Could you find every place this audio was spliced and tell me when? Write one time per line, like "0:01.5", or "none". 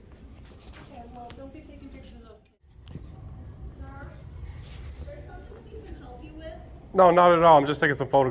0:02.6

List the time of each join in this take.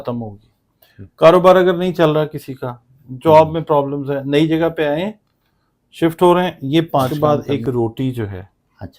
0:07.1

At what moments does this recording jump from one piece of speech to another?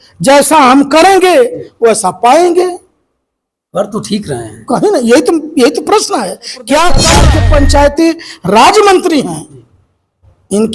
0:07.1

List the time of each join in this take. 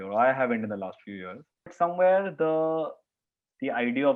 0:01.7

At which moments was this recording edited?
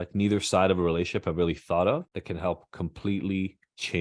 none

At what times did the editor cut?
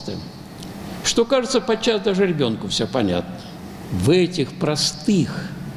0:03.9

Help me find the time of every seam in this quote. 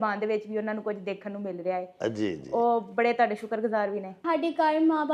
0:04.2

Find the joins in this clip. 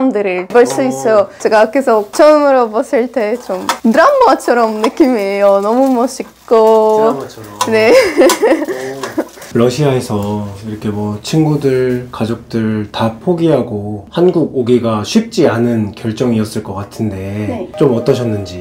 0:09.4

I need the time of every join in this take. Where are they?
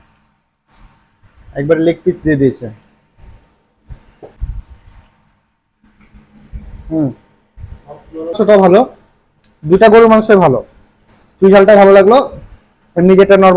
0:04.4
0:08.4

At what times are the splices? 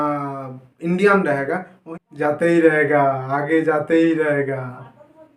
0:01.8

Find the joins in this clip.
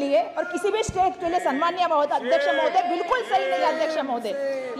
none

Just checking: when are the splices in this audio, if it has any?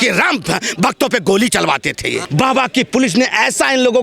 0:02.2

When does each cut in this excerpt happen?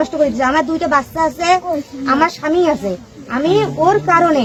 none

